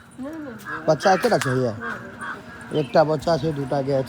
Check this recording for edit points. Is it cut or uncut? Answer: uncut